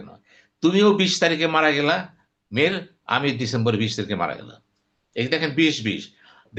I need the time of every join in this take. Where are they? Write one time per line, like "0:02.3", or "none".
none